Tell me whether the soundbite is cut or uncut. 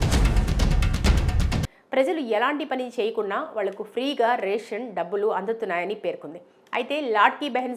cut